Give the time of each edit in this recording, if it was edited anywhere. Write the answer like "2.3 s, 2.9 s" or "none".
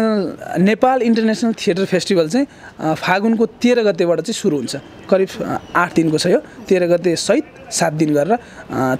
none